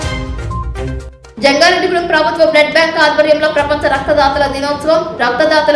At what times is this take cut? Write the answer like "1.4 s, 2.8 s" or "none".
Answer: 0.9 s